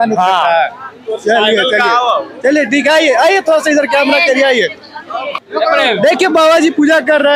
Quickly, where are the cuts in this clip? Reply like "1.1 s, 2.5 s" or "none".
none

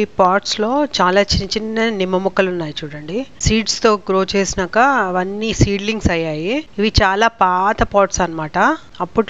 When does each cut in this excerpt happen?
none

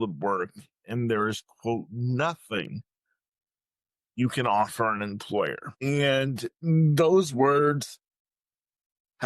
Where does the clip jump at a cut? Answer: 5.7 s

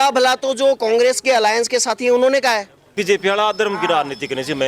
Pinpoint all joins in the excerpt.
2.9 s

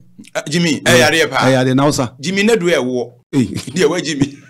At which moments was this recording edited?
3.2 s

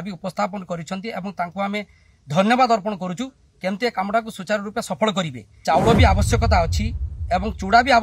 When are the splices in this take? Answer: 5.4 s

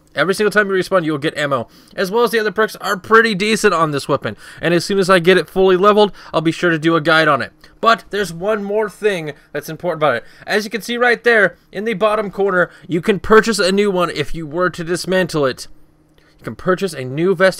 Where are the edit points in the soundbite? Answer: 14.6 s

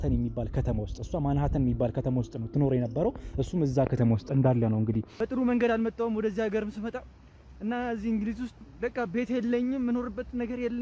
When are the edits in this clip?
5.1 s

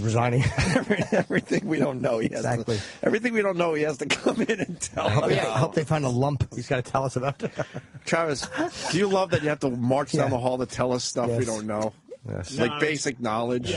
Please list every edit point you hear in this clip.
none

